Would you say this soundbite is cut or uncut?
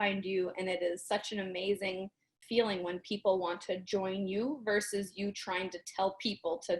cut